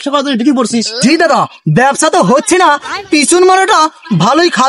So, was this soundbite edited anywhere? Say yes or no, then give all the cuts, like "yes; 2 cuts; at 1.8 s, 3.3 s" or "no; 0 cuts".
no; 0 cuts